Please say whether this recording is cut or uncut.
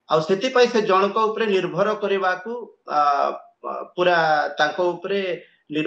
uncut